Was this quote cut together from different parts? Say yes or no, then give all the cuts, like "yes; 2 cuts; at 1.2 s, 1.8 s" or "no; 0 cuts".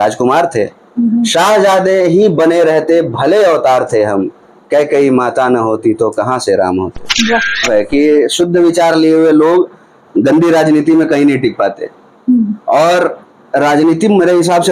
yes; 1 cut; at 7.7 s